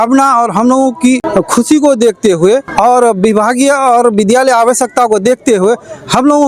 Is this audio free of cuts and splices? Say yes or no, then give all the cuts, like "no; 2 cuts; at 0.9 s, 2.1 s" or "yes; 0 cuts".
no; 2 cuts; at 1.2 s, 2.7 s